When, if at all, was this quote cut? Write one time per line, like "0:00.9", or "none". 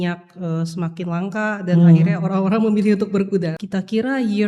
0:03.6